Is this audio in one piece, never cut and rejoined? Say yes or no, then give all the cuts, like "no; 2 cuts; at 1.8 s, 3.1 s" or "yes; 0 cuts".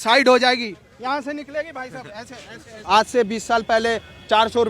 no; 1 cut; at 2.8 s